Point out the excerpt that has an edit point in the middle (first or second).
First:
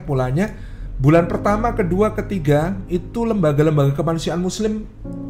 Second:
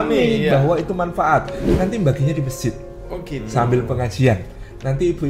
second